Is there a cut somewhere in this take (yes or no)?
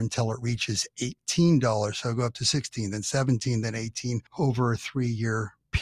yes